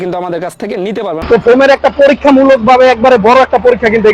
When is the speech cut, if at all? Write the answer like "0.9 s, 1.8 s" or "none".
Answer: 1.2 s